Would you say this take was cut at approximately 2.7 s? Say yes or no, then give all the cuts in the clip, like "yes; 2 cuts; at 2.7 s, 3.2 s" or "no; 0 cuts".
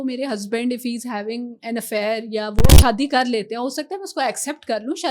yes; 1 cut; at 2.7 s